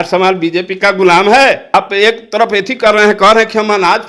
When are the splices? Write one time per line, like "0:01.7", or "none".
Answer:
0:01.7